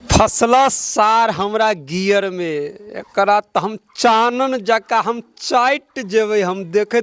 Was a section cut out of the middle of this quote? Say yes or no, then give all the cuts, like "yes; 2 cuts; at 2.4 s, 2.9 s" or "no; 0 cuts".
no; 0 cuts